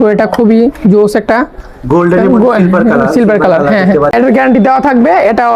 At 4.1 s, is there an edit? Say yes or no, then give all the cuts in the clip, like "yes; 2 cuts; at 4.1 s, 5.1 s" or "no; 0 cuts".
yes; 1 cut; at 4.1 s